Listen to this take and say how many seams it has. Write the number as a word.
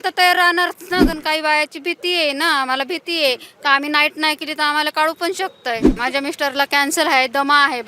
two